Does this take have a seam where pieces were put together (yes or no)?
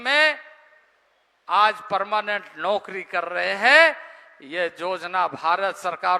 no